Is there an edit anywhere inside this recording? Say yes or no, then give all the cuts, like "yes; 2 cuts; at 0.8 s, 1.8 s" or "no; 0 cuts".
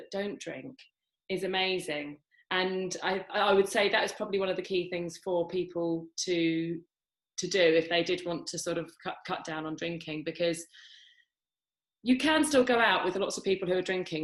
no; 0 cuts